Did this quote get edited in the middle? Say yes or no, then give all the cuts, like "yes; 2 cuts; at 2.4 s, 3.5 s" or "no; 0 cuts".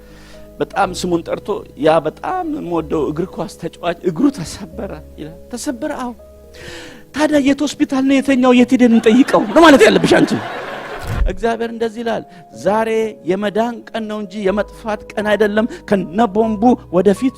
yes; 1 cut; at 11.1 s